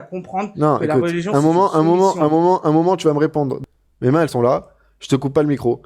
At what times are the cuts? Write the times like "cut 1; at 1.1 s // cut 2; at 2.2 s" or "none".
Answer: cut 1; at 3.6 s